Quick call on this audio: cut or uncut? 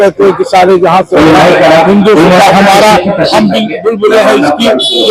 uncut